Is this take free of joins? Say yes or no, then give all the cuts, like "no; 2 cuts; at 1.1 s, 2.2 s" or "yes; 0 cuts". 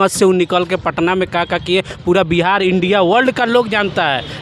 yes; 0 cuts